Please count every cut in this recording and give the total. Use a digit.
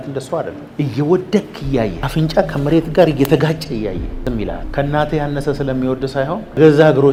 0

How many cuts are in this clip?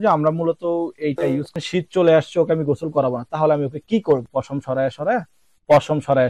2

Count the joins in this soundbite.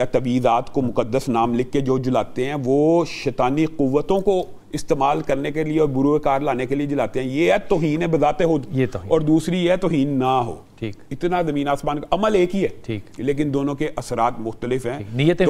0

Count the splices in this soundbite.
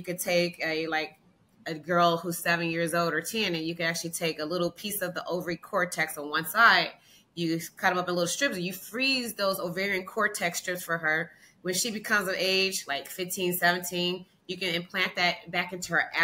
0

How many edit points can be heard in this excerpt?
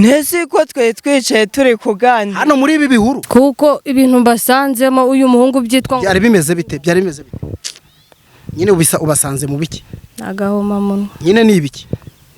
1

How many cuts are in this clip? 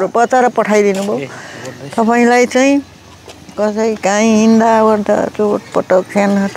0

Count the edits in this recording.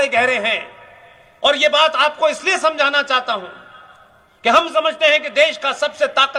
0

